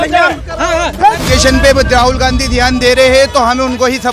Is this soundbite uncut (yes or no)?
no